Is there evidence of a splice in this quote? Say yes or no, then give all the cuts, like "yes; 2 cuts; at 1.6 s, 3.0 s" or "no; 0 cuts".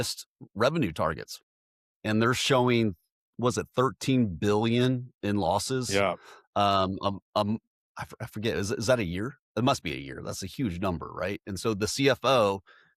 no; 0 cuts